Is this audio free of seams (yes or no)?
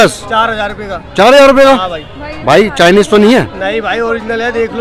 yes